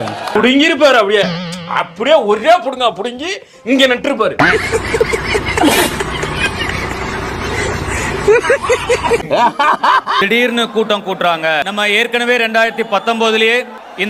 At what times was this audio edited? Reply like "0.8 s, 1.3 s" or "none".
none